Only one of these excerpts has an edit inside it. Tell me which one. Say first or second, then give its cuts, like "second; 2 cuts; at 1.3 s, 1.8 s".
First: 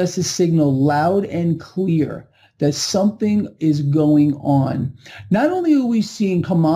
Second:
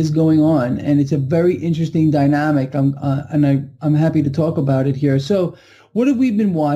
first; 1 cut; at 5.5 s